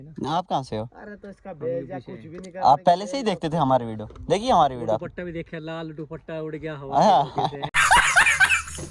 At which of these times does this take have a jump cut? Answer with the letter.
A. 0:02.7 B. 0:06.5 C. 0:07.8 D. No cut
C